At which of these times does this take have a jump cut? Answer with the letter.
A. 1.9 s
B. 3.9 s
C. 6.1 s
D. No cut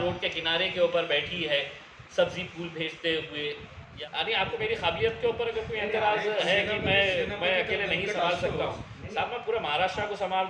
B